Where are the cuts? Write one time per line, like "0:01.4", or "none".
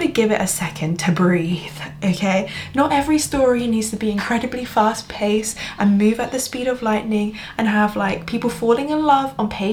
none